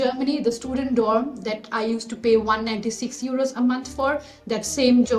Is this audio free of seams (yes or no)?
yes